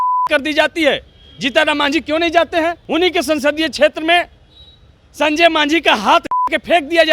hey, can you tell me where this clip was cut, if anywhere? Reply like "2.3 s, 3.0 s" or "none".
2.8 s